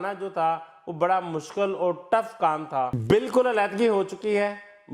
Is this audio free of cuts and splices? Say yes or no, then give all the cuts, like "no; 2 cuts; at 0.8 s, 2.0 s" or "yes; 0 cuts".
no; 1 cut; at 3.0 s